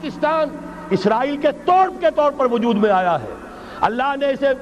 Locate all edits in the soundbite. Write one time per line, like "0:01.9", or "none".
none